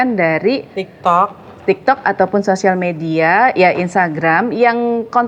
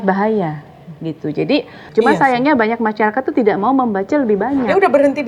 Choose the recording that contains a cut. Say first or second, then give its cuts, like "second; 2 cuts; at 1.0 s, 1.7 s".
second; 1 cut; at 1.8 s